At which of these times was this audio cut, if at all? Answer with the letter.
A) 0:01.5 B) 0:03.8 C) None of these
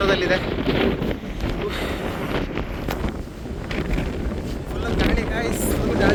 C